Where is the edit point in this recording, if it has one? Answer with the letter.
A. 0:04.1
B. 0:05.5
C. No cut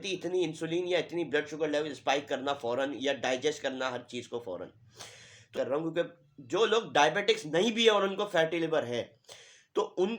B